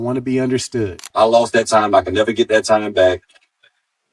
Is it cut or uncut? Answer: cut